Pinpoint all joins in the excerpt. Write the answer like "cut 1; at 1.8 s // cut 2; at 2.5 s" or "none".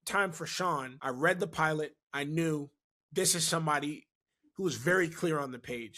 cut 1; at 0.9 s